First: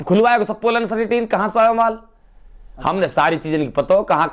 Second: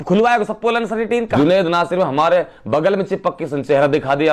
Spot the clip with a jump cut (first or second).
second